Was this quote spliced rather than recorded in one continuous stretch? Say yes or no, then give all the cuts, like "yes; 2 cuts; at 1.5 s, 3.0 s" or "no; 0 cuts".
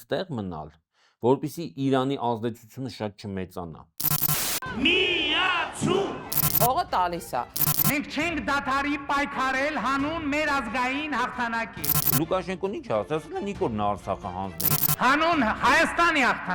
yes; 1 cut; at 3.9 s